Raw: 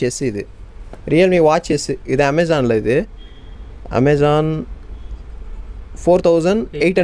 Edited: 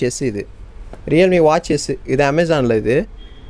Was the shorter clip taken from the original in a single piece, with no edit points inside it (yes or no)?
yes